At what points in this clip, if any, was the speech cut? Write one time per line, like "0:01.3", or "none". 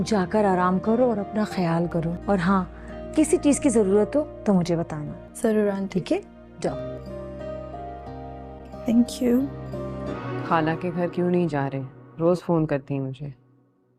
0:10.1